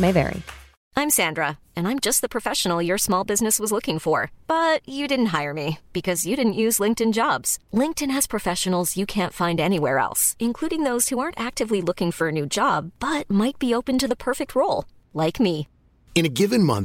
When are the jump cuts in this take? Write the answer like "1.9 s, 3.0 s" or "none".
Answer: none